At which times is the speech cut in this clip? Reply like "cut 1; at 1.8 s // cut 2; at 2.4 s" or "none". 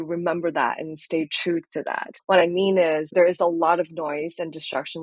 cut 1; at 2.1 s // cut 2; at 3.1 s